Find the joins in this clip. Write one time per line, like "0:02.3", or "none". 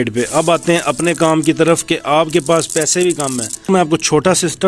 0:03.7